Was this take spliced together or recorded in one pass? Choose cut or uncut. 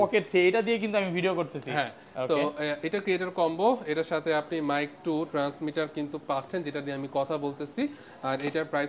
uncut